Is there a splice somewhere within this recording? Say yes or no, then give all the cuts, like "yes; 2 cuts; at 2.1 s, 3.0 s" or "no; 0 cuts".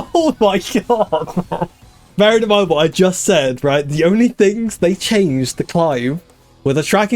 yes; 1 cut; at 2.1 s